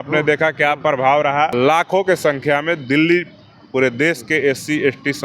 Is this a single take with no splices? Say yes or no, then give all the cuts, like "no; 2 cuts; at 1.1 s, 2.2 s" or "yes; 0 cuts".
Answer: no; 1 cut; at 1.5 s